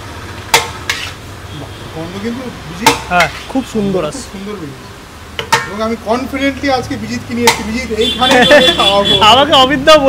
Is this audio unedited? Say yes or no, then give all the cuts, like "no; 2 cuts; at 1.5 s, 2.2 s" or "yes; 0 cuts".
yes; 0 cuts